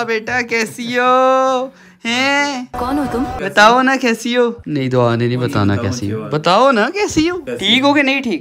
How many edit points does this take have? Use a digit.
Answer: 0